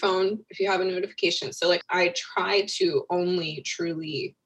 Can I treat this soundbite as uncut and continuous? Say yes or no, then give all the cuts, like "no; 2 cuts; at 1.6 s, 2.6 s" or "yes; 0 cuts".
no; 1 cut; at 1.8 s